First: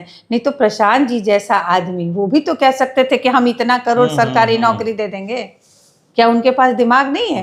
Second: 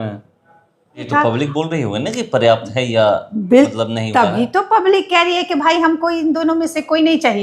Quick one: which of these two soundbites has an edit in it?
second; 1 cut; at 1.1 s

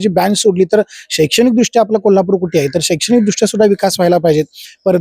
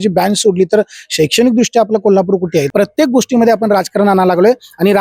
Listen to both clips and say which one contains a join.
second; 1 cut; at 2.7 s

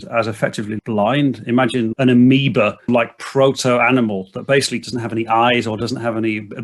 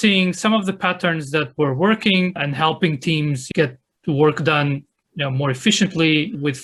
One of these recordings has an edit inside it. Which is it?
first; 3 cuts; at 1.9 s, 2.9 s, 4.8 s

